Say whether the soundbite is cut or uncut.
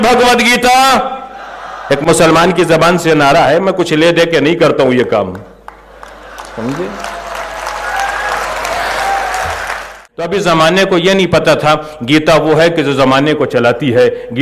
cut